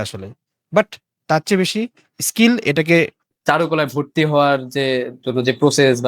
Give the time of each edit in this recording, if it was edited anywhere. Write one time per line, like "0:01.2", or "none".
0:03.3